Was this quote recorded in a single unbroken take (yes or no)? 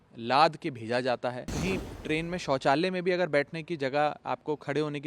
no